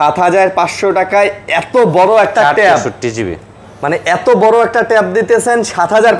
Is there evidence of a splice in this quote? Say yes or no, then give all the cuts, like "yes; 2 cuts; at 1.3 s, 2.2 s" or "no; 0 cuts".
no; 0 cuts